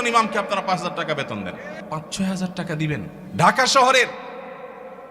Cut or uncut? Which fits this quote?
cut